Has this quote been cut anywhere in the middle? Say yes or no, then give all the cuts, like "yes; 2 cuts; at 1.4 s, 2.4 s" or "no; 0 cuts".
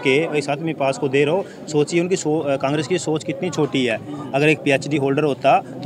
no; 0 cuts